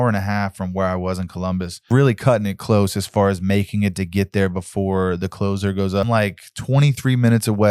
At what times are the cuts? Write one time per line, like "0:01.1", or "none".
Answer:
0:01.9
0:06.1